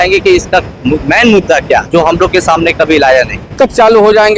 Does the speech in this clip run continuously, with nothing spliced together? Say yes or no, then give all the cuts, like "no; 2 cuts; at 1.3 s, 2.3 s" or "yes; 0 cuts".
no; 2 cuts; at 1.9 s, 3.5 s